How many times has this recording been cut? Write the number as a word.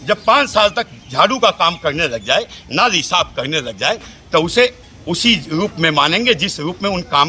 zero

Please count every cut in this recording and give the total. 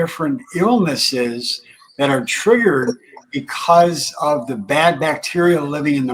zero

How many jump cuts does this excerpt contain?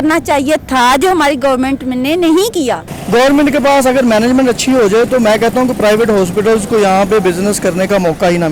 one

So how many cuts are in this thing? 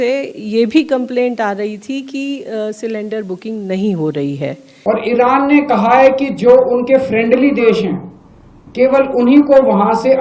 one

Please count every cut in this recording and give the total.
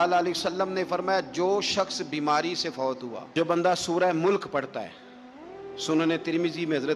one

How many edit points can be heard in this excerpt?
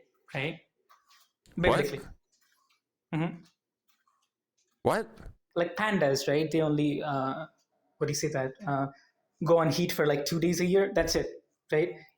one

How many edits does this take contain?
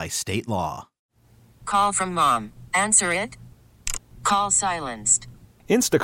one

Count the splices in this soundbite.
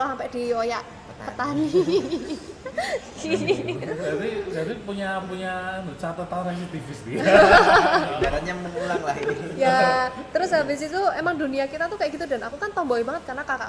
zero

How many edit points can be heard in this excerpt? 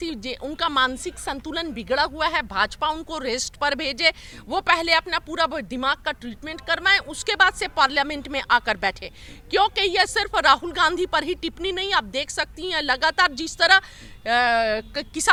zero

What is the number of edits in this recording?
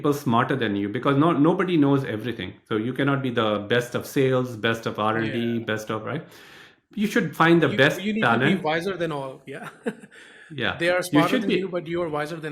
zero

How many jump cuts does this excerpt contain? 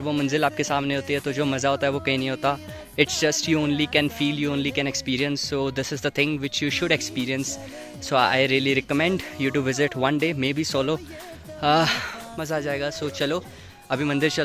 zero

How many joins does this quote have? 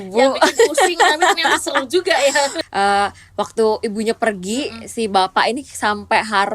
one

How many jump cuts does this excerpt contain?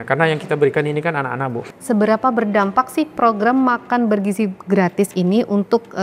one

